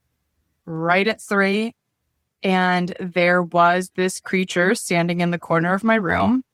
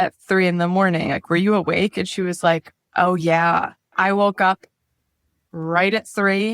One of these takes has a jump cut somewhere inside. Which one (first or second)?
second